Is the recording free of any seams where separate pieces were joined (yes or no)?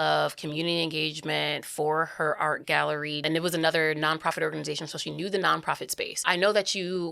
no